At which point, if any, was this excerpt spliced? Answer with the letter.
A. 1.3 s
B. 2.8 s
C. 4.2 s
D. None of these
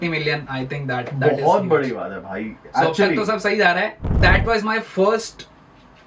C